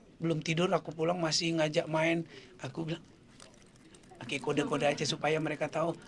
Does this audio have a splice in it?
no; 0 cuts

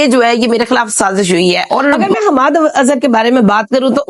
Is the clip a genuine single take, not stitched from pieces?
no; 1 cut; at 2.0 s

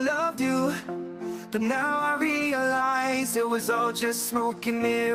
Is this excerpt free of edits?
yes; 0 cuts

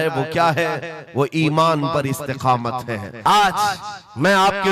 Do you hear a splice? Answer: yes; 1 cut; at 3.1 s

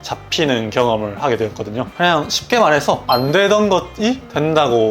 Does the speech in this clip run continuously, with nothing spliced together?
no; 1 cut; at 1.9 s

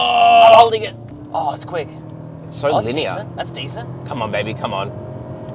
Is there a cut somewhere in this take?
yes; 1 cut; at 1.2 s

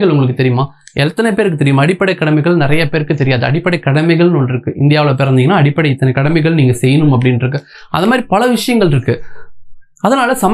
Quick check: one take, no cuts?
yes; 0 cuts

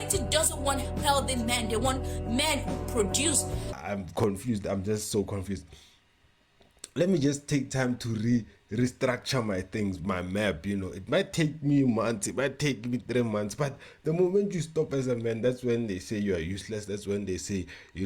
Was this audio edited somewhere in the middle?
yes; 1 cut; at 3.7 s

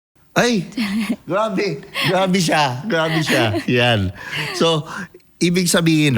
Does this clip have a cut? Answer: no; 0 cuts

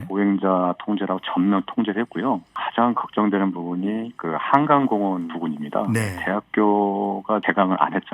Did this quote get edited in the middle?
yes; 4 cuts; at 2.6 s, 5.3 s, 6.1 s, 7.4 s

